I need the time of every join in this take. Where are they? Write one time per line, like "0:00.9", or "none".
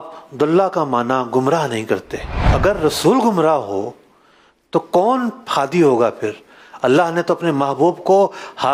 none

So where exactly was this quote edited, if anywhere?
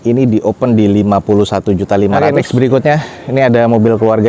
0:02.2

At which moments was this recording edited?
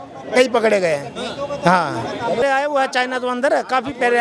0:02.4

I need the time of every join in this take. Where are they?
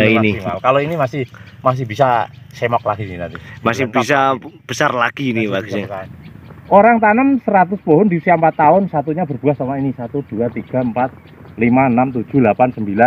0:06.0

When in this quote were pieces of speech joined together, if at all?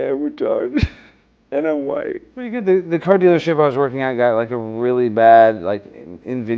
0:02.6

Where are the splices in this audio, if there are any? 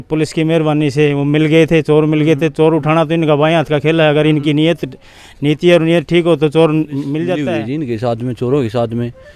0:07.4

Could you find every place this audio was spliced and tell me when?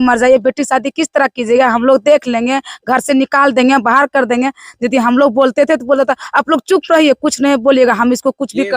none

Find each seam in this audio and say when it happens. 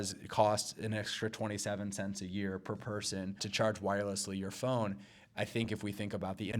0:03.5

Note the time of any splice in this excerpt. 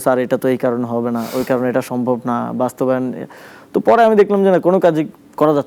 none

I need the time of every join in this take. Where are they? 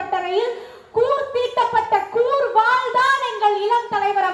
none

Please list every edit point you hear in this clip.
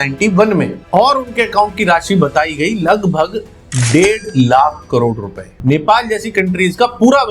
0:05.6

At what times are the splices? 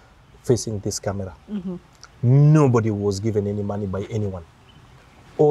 none

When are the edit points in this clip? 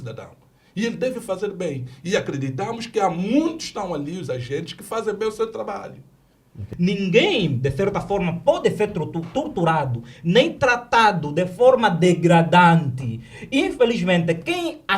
0:06.6

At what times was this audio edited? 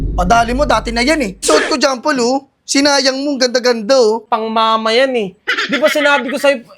0:01.4
0:04.2

